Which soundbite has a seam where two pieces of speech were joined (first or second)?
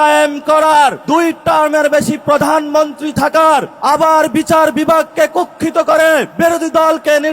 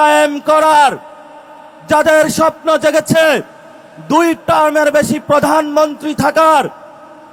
first